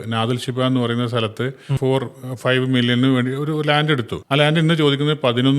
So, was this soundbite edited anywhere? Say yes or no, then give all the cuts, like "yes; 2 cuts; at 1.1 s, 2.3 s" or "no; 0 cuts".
yes; 2 cuts; at 1.8 s, 4.2 s